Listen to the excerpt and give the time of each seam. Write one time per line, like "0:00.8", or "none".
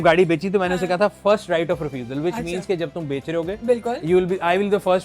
none